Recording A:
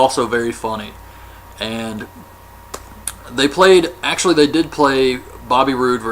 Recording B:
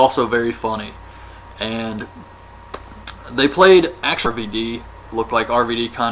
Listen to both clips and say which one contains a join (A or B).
A